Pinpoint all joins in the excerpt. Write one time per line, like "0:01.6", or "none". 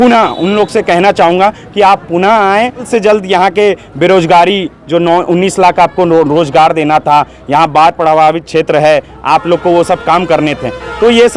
0:02.9